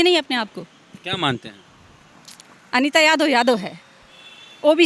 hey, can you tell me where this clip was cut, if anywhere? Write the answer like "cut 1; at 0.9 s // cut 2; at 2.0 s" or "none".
none